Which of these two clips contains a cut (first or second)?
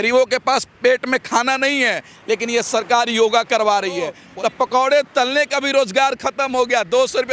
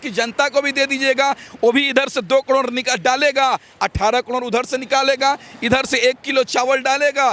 first